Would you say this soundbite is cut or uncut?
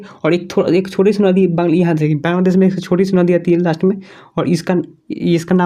uncut